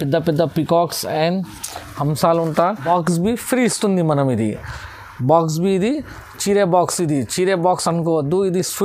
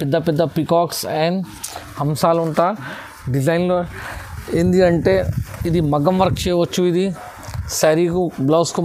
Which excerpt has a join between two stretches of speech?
first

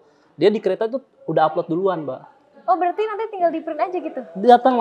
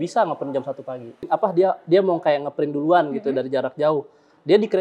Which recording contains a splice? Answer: second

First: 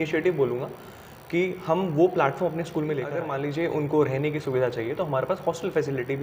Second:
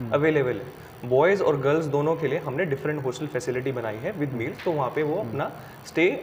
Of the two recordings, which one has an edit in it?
first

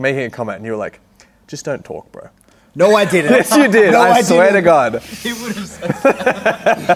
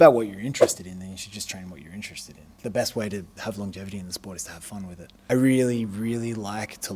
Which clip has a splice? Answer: second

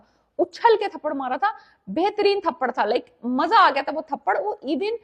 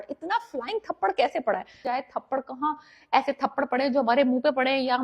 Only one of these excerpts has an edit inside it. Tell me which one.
second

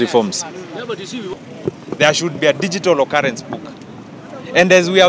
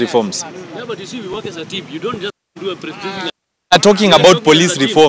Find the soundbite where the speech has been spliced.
first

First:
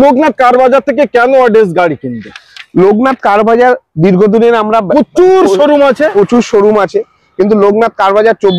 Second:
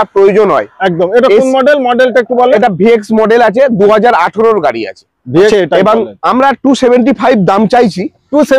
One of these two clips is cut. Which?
second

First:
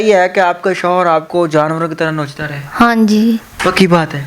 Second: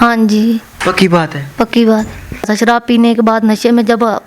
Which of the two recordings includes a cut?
second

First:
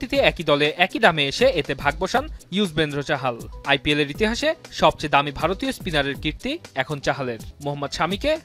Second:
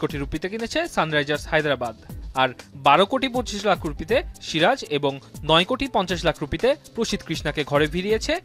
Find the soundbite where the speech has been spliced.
first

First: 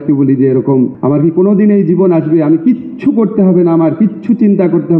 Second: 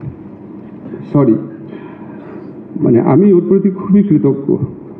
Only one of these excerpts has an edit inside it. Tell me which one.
first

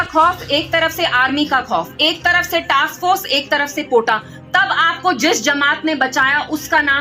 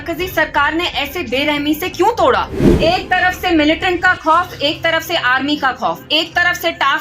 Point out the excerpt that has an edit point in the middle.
second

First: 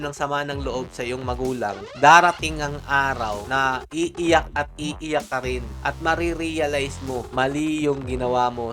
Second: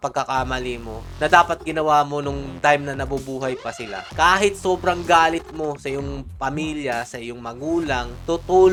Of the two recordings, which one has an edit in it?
first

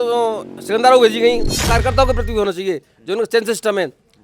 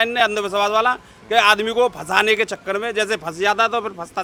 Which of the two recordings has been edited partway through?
first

